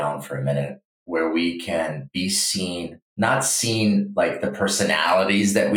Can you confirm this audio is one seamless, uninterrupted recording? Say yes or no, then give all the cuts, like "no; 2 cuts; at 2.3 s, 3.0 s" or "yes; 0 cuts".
no; 1 cut; at 3.0 s